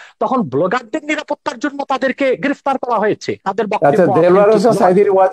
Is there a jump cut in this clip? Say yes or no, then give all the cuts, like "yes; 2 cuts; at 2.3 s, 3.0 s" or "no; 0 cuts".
yes; 1 cut; at 3.4 s